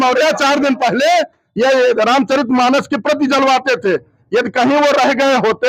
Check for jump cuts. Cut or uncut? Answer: uncut